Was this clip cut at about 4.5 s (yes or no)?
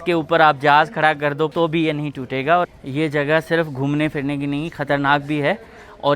no